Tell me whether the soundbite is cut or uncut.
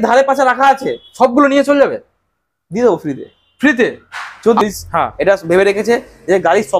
cut